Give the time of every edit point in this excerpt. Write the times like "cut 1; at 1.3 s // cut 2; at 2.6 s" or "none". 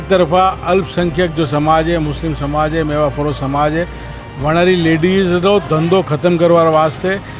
none